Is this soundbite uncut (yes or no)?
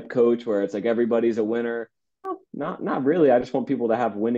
no